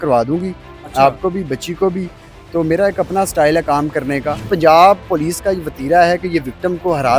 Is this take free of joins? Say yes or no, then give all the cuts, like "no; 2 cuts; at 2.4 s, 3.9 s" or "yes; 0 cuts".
no; 1 cut; at 4.5 s